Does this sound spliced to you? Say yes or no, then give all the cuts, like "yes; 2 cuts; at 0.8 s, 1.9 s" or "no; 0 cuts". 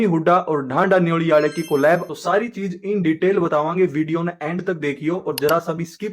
yes; 1 cut; at 2.1 s